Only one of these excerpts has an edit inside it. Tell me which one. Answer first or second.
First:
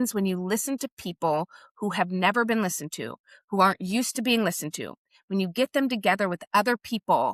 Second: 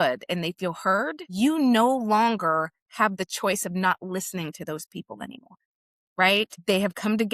second